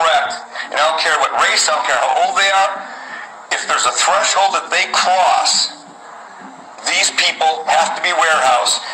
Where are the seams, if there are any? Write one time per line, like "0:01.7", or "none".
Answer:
0:04.6